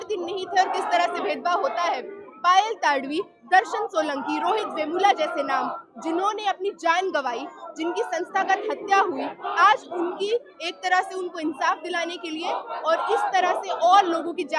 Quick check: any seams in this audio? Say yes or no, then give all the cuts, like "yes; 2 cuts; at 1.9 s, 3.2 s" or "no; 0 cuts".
no; 0 cuts